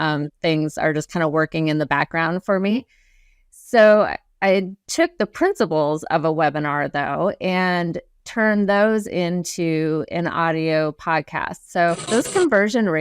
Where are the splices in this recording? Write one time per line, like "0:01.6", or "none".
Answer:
0:12.0